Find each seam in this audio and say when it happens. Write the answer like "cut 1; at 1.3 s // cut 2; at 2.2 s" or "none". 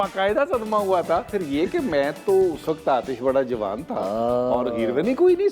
cut 1; at 1.3 s